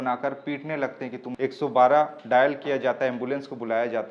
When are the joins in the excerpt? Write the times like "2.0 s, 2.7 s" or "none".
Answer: 1.2 s